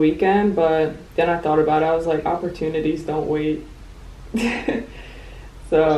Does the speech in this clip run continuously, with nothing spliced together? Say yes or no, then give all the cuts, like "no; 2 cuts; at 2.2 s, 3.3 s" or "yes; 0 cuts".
yes; 0 cuts